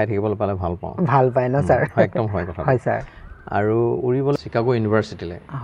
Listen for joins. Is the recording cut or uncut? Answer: cut